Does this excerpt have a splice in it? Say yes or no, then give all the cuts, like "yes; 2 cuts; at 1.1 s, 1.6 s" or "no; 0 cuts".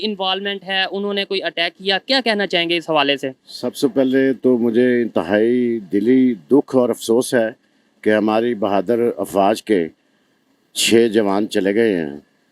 no; 0 cuts